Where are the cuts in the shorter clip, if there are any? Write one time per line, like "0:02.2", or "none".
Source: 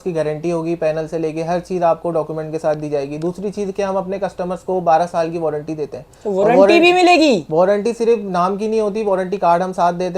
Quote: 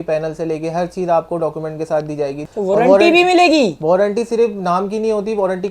0:02.4